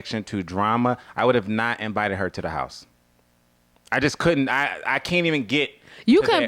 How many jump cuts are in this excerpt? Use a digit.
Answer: 0